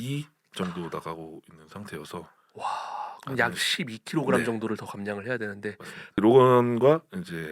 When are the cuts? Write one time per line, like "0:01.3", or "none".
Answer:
0:06.2

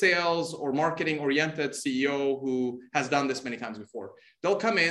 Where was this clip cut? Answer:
none

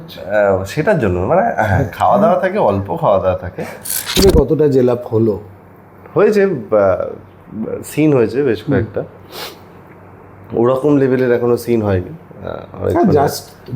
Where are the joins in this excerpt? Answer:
0:04.2

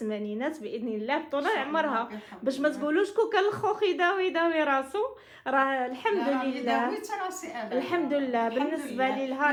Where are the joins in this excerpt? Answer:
none

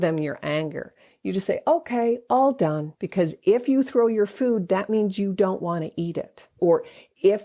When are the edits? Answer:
0:02.9
0:06.6

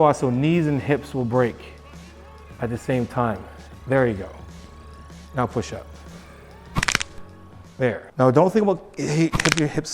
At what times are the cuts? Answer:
0:08.0

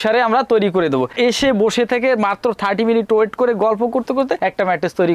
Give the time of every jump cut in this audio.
0:01.1

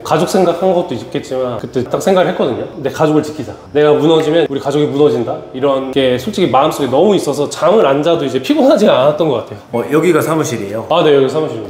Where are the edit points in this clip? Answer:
none

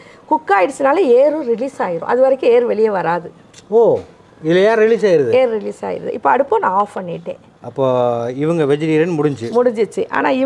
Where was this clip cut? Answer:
none

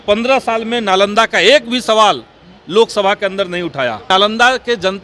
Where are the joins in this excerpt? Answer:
0:04.0

